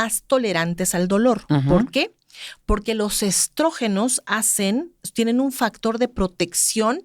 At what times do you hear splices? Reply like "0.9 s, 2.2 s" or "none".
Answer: none